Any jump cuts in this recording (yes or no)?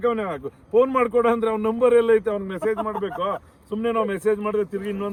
no